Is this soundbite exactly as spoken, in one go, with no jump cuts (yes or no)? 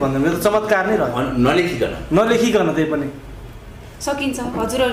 yes